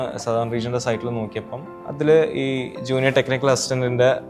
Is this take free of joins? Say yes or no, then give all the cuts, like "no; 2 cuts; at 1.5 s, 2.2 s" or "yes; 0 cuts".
no; 1 cut; at 2.0 s